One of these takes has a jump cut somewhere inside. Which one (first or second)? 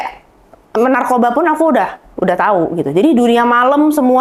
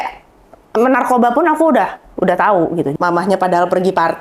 second